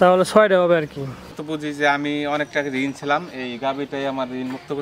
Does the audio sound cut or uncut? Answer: cut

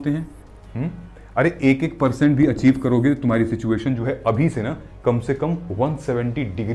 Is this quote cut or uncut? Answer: uncut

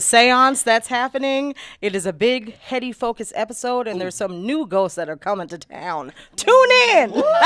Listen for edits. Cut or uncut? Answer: uncut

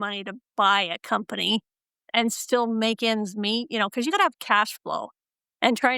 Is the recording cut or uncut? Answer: cut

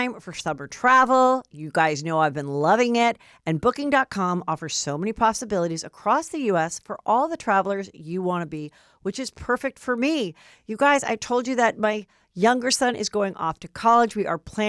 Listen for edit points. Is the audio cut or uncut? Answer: uncut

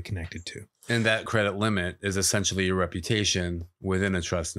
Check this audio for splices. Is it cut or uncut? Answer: cut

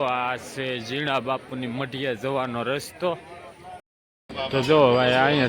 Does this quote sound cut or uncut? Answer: cut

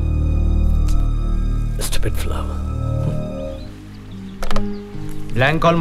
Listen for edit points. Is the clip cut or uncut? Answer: cut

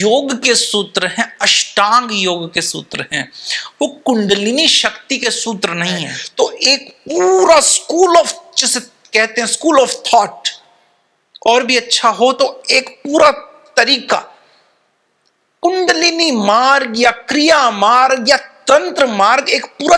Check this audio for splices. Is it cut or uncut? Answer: cut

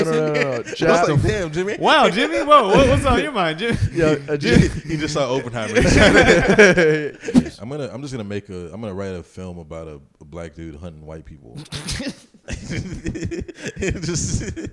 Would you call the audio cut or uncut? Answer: cut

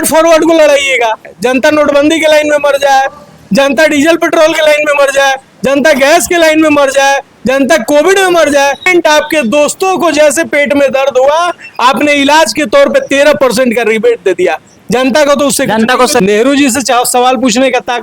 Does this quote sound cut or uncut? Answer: cut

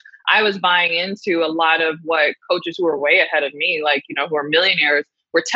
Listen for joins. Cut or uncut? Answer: uncut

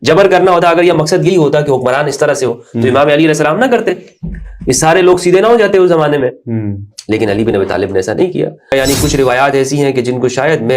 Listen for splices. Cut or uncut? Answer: cut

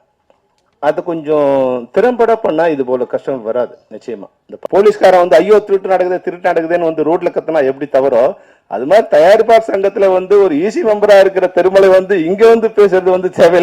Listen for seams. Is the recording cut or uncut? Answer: cut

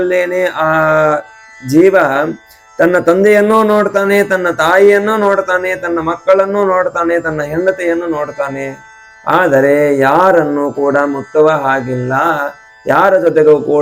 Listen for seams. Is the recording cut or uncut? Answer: uncut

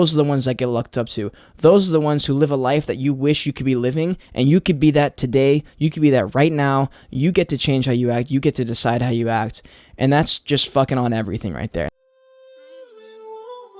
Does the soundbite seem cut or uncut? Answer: cut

